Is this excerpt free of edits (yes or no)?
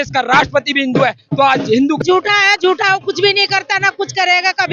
no